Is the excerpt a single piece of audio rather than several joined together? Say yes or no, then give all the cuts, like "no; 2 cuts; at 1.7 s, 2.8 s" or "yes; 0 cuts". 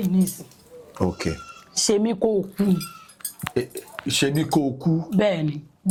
yes; 0 cuts